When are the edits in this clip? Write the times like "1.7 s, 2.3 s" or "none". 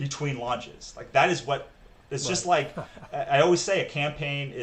none

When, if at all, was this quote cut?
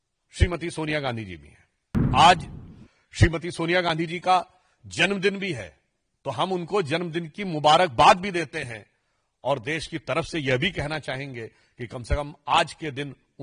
2.1 s

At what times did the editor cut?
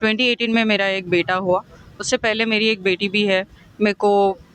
none

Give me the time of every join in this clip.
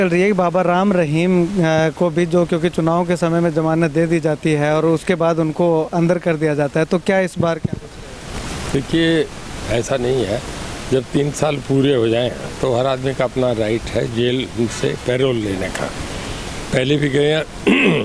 none

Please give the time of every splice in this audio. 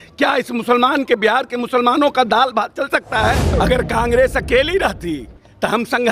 3.4 s

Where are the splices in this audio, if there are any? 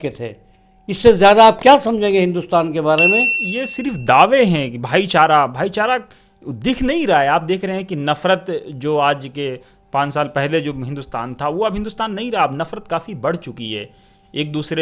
3.4 s

